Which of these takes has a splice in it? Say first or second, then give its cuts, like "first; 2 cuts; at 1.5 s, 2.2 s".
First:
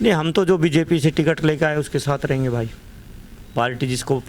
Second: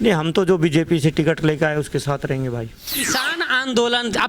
second; 1 cut; at 2.9 s